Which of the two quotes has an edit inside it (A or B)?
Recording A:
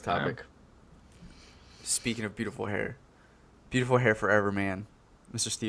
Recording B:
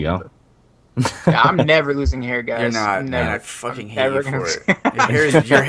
B